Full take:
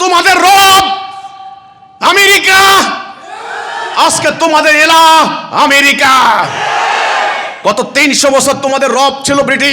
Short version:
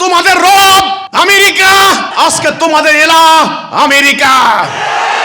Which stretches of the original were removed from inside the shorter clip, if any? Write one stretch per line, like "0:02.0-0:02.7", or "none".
0:01.0-0:01.9
0:03.0-0:03.9